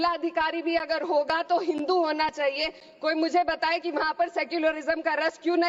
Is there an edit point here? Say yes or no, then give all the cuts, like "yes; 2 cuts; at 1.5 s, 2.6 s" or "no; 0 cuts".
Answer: no; 0 cuts